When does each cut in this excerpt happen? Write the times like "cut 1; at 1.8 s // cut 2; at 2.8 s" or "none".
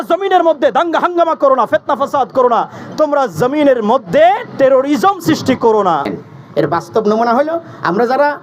cut 1; at 6.0 s